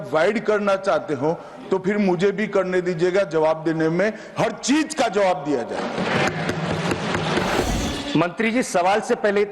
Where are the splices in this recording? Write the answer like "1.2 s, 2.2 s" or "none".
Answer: 7.6 s